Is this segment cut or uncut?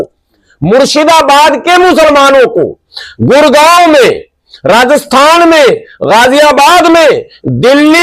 uncut